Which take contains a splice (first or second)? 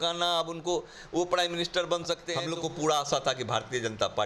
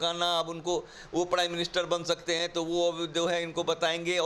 first